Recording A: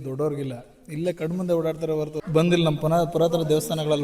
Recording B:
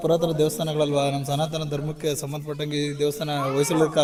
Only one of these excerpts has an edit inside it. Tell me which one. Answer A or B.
A